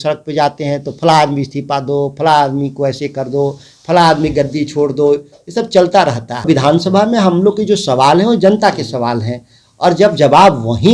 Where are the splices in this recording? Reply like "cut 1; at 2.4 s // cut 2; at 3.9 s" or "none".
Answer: cut 1; at 6.5 s

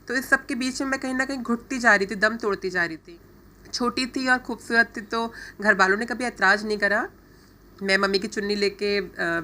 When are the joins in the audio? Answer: cut 1; at 3.0 s

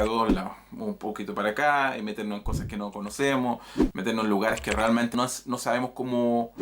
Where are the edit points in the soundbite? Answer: cut 1; at 5.1 s

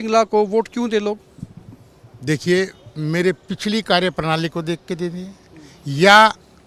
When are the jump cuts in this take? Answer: none

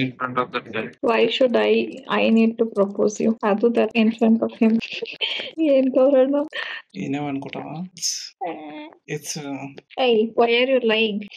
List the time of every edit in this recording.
cut 1; at 0.9 s // cut 2; at 8.3 s

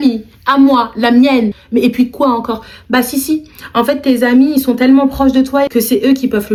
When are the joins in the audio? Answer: none

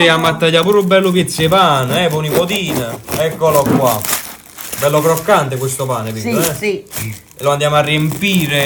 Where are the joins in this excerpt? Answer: none

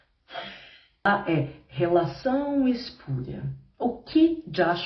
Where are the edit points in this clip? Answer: cut 1; at 1.1 s

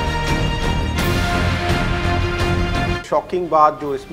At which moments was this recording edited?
cut 1; at 3.0 s

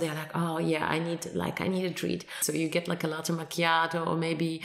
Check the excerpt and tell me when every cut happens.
cut 1; at 2.4 s

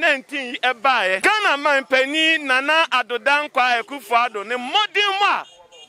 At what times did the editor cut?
cut 1; at 1.2 s

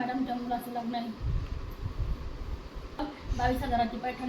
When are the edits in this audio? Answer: cut 1; at 3.0 s

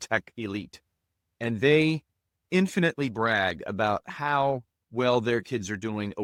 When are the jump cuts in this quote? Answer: none

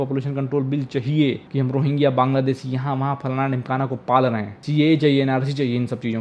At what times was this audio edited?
cut 1; at 1.4 s // cut 2; at 4.6 s

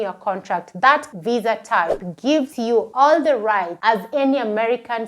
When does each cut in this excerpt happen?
cut 1; at 2.7 s

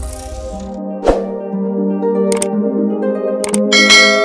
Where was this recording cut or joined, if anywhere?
none

